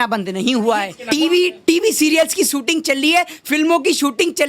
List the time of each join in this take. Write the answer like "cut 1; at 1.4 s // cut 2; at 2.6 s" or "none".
cut 1; at 1.0 s